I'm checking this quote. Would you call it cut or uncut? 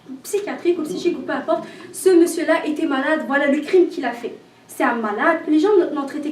cut